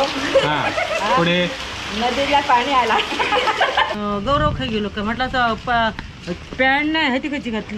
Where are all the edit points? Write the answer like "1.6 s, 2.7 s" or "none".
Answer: 3.9 s

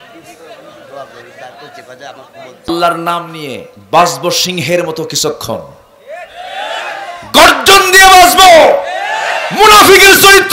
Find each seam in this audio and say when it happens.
2.7 s

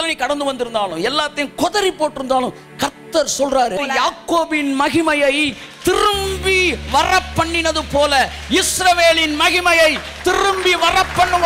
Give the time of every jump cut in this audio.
3.8 s

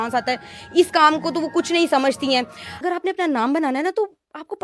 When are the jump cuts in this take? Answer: 2.8 s

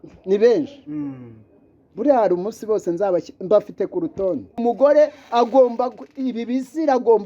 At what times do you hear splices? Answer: 4.6 s

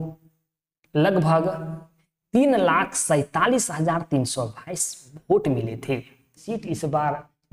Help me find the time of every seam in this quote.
6.4 s

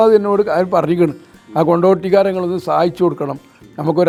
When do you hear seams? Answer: none

